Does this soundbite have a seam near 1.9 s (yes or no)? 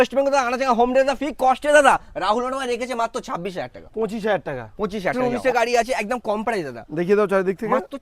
no